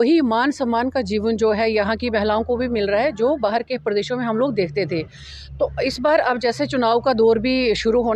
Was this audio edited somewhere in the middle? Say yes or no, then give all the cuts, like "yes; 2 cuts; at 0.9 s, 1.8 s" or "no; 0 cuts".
no; 0 cuts